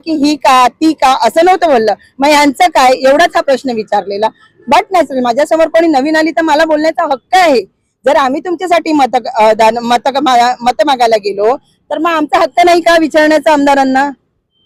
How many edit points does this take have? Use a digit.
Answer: 0